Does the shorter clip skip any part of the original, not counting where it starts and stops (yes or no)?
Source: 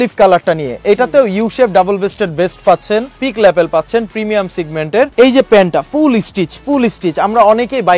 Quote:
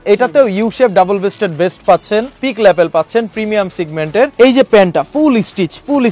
no